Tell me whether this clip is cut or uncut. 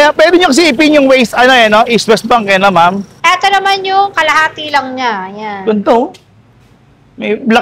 cut